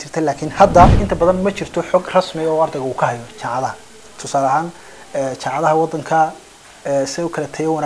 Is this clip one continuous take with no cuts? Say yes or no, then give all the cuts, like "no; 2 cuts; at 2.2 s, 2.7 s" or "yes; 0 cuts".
no; 1 cut; at 1.0 s